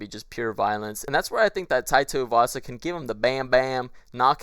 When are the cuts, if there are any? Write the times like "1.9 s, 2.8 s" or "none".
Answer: 1.0 s